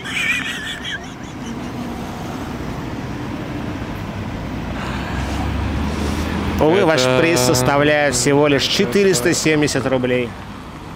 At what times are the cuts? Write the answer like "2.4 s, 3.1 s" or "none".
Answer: none

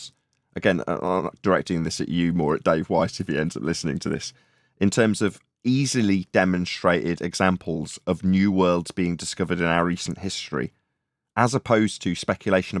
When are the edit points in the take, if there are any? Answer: none

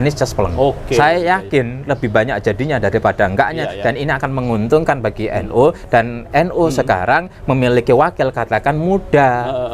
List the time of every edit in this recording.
none

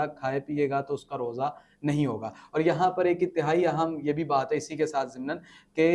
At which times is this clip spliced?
none

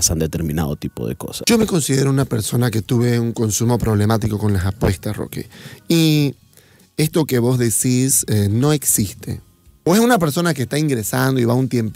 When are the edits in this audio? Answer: 1.3 s, 9.6 s

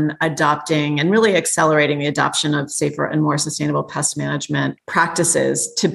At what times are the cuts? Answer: 4.8 s

